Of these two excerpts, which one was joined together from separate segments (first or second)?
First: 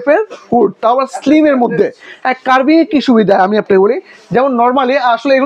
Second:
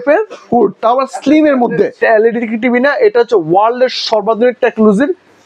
second